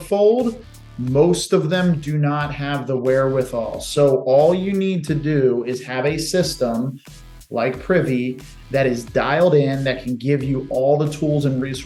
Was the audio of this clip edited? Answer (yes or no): no